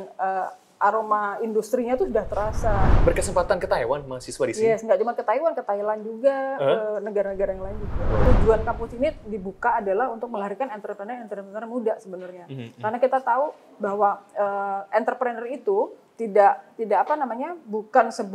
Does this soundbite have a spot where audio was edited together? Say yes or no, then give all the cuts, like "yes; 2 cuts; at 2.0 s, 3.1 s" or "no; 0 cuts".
yes; 2 cuts; at 2.9 s, 8.2 s